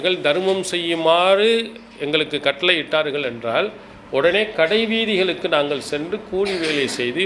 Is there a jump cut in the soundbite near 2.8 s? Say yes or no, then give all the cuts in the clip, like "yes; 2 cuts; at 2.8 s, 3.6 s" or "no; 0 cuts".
no; 0 cuts